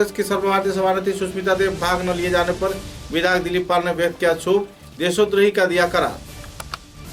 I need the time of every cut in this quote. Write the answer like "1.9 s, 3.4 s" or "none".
none